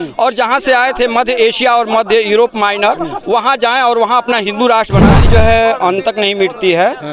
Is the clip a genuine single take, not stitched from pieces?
no; 1 cut; at 5.2 s

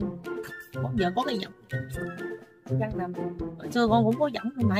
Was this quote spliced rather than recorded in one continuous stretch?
no; 0 cuts

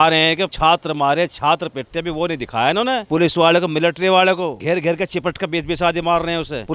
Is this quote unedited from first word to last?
yes; 0 cuts

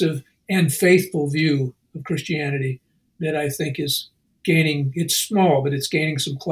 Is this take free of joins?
yes; 0 cuts

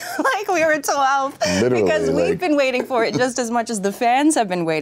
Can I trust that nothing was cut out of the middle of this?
yes; 0 cuts

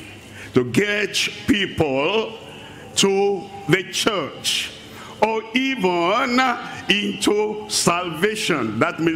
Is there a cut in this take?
no; 0 cuts

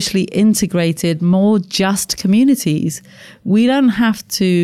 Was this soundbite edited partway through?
no; 0 cuts

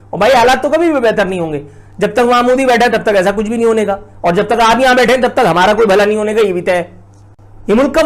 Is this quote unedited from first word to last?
yes; 0 cuts

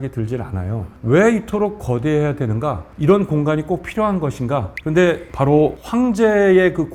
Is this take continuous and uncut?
yes; 0 cuts

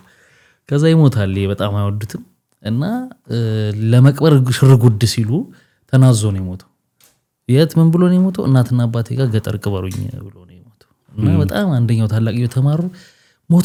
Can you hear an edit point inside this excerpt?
no; 0 cuts

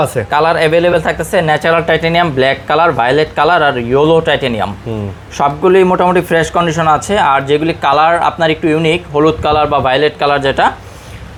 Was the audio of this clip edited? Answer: no; 0 cuts

